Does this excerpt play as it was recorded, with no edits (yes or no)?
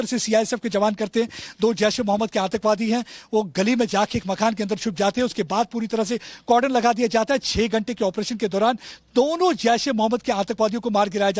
no